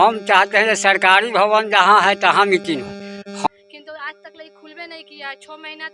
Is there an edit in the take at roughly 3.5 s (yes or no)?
yes